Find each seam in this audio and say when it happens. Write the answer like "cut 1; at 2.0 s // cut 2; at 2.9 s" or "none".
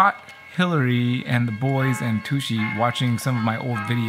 none

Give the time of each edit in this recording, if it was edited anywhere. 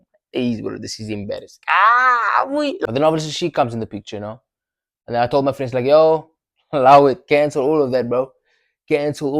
cut 1; at 2.8 s

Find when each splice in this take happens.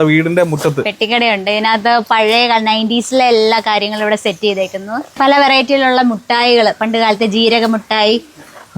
none

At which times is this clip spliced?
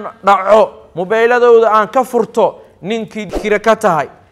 cut 1; at 3.4 s

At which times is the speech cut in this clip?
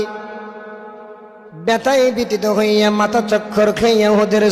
none

